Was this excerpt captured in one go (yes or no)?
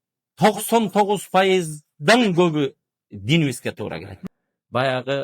no